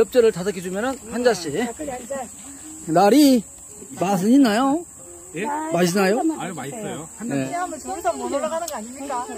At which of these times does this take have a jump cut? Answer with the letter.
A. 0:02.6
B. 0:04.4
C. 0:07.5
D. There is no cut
C